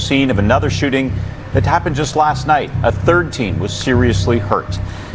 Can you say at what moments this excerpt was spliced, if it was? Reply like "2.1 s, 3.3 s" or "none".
none